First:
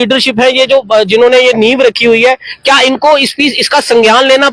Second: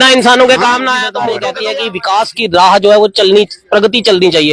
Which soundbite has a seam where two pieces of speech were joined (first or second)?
second